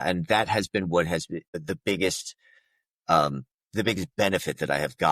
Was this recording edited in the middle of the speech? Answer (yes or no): yes